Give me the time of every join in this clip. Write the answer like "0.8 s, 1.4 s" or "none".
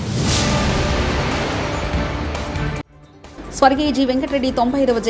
none